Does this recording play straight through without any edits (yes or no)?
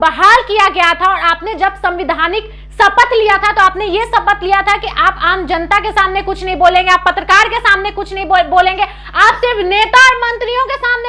yes